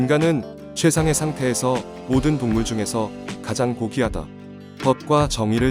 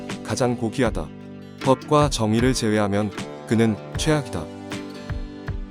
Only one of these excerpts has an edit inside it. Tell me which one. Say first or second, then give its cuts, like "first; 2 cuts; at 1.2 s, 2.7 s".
second; 1 cut; at 4.5 s